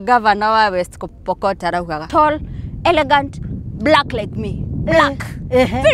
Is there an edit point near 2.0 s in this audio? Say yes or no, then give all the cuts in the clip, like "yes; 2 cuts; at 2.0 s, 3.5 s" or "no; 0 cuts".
yes; 1 cut; at 2.0 s